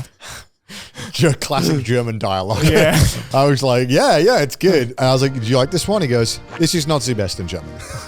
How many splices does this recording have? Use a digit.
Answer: 3